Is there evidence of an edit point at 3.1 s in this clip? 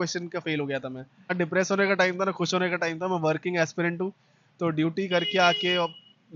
no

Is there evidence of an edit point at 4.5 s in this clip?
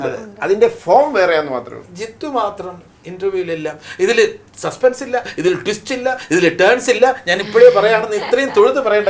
no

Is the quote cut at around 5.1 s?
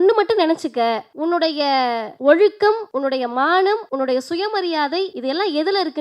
yes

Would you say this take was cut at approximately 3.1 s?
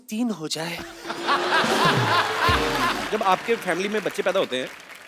yes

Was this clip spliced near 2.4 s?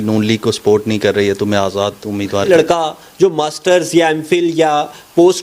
yes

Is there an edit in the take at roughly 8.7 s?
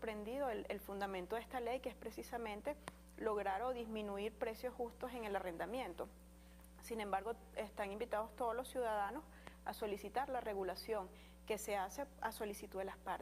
no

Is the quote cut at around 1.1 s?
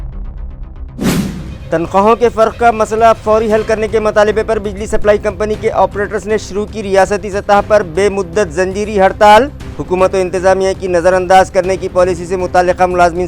yes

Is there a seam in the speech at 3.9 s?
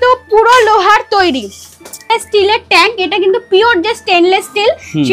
no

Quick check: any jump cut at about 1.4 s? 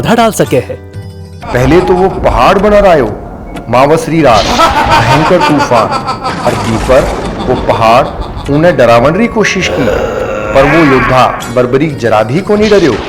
yes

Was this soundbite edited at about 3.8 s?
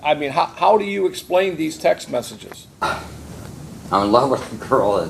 yes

